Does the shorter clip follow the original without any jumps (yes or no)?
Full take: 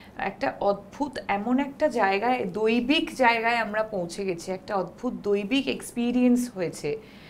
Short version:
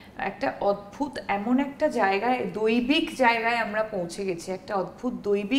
yes